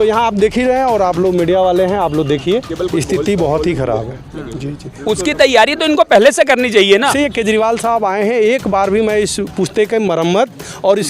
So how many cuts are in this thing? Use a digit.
2